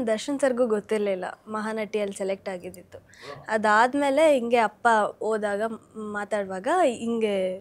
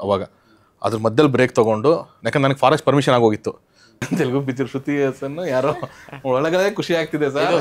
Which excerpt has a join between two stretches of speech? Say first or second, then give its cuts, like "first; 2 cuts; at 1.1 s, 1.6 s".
second; 1 cut; at 4.1 s